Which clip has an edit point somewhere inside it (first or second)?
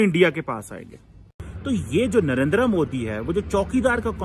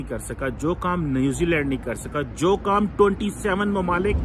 first